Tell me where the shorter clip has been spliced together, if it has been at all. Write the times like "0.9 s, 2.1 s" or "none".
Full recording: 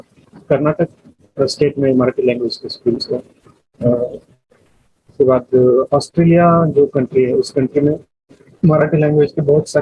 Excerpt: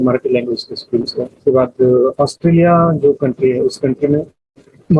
1.3 s